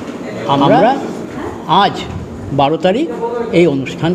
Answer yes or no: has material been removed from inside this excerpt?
yes